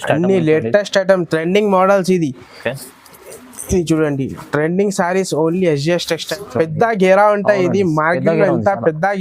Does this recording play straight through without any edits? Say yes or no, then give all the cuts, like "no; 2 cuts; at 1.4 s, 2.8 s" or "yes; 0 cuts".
no; 1 cut; at 6.3 s